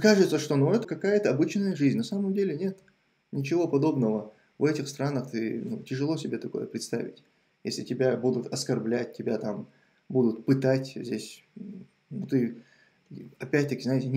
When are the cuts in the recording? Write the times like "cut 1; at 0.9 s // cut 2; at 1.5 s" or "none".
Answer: cut 1; at 0.9 s